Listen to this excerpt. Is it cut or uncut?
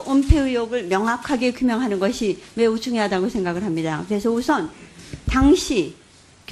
cut